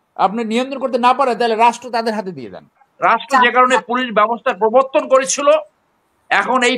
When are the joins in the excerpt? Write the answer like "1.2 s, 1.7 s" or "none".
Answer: 2.8 s